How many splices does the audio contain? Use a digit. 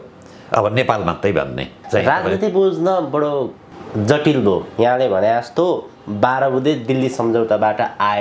1